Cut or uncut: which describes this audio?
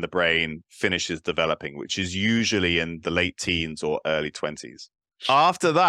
cut